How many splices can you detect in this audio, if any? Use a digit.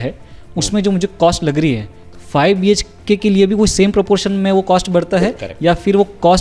0